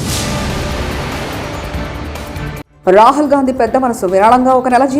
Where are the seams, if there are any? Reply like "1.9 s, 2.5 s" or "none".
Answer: 2.7 s